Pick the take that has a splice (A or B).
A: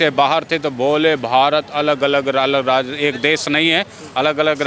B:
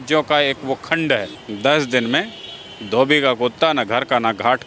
B